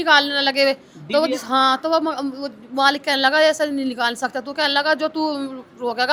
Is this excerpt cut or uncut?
uncut